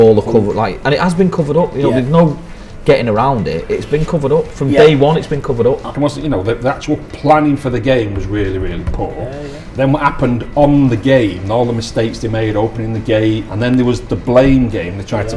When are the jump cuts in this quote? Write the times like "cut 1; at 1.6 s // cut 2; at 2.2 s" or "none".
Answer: cut 1; at 5.9 s // cut 2; at 13.5 s

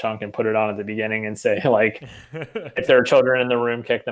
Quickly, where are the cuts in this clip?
none

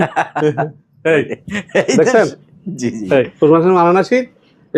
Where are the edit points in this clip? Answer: none

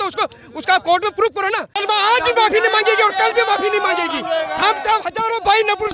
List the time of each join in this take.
cut 1; at 1.8 s

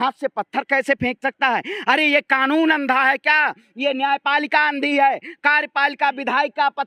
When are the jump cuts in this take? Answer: none

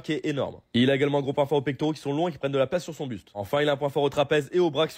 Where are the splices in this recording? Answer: cut 1; at 3.4 s

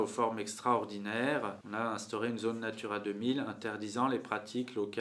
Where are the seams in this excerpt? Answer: cut 1; at 1.6 s

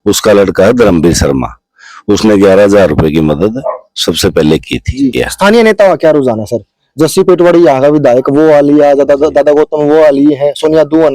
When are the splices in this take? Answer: cut 1; at 5.3 s

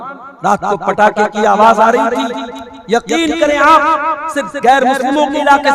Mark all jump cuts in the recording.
none

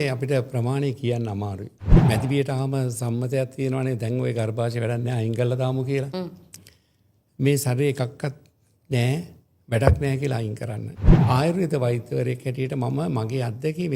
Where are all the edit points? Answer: cut 1; at 1.9 s // cut 2; at 11.1 s

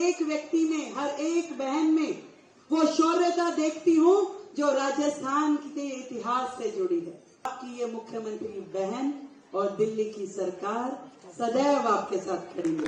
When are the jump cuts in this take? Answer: cut 1; at 7.5 s

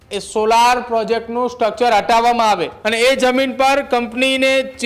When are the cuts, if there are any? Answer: cut 1; at 2.7 s

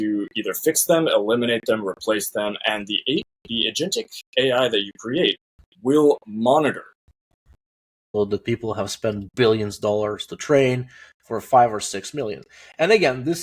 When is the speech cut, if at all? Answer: cut 1; at 8.0 s

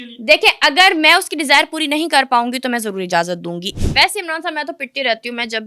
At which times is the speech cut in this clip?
cut 1; at 3.7 s

